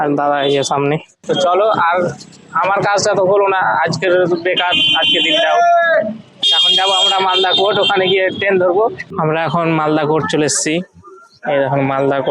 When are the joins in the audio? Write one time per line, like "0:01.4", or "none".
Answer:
0:01.1